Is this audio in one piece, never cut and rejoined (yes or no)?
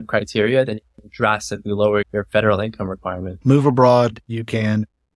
no